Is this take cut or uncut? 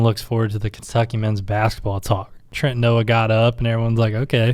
cut